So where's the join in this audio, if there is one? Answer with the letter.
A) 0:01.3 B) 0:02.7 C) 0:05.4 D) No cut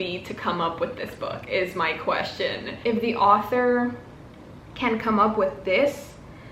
B